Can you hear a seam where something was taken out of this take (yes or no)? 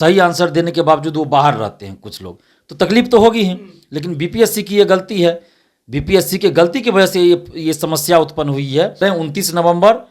yes